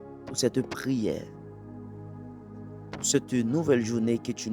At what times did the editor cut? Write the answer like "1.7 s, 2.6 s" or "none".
1.3 s, 3.1 s